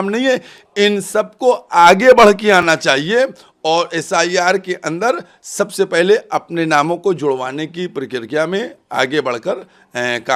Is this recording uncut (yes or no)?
yes